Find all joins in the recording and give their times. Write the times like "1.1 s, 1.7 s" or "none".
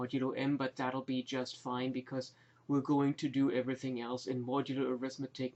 2.4 s